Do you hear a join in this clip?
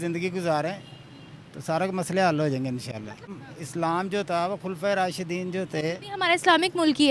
yes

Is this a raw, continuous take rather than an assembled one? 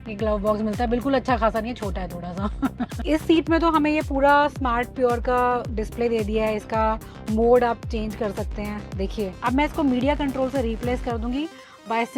no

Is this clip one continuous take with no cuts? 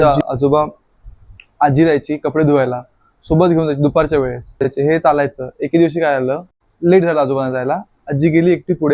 no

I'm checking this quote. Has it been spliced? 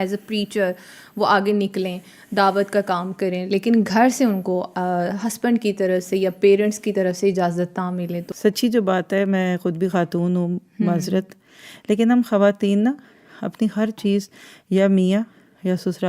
yes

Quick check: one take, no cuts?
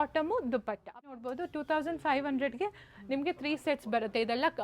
no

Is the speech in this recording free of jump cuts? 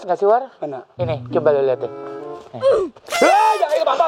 yes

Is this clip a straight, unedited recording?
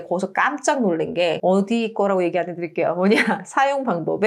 yes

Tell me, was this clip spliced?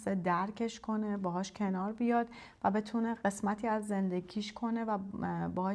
no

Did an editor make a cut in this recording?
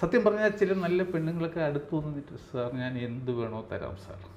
no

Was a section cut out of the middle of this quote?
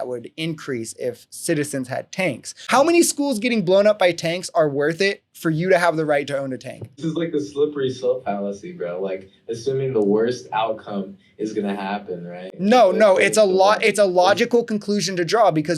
yes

